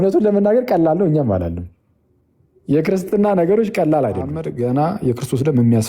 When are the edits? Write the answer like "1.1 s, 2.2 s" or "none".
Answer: 4.5 s